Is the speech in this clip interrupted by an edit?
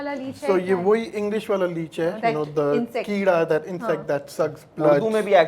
no; 0 cuts

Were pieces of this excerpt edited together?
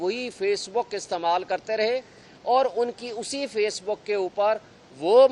no; 0 cuts

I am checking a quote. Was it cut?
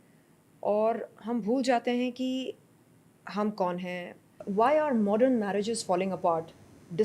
yes; 1 cut; at 4.4 s

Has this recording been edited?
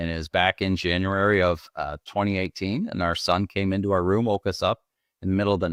no; 0 cuts

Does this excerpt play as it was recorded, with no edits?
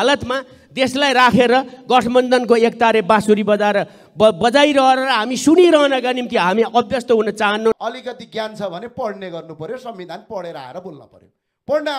no; 1 cut; at 7.8 s

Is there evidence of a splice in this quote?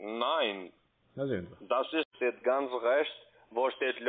yes; 1 cut; at 2.1 s

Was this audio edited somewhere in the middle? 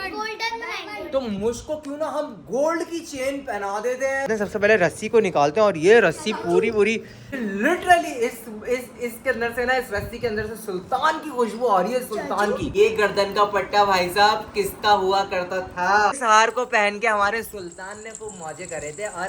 yes; 4 cuts; at 4.3 s, 7.4 s, 12.6 s, 16.2 s

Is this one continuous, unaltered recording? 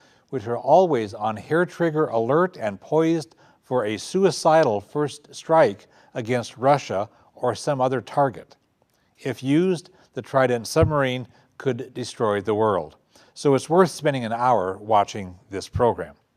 yes; 0 cuts

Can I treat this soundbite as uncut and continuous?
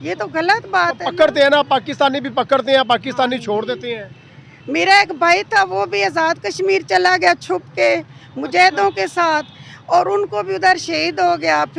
yes; 0 cuts

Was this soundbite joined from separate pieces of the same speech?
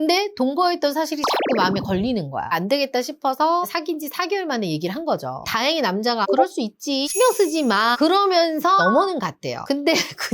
yes; 3 cuts; at 2.5 s, 5.4 s, 8.8 s

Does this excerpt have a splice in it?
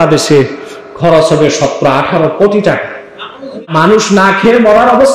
yes; 1 cut; at 3.7 s

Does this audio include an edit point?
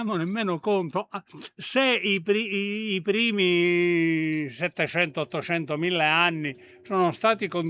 no; 0 cuts

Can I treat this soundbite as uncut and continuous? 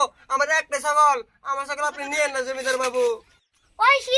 no; 1 cut; at 3.2 s

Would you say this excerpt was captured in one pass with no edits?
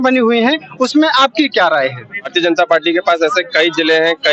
no; 1 cut; at 2.3 s

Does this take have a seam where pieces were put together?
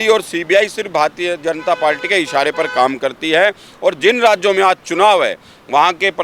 no; 0 cuts

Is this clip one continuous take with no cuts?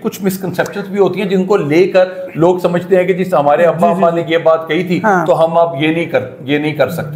yes; 0 cuts

